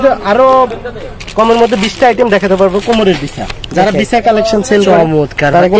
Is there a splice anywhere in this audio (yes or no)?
no